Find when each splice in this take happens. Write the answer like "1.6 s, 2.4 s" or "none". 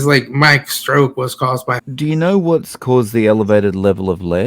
1.8 s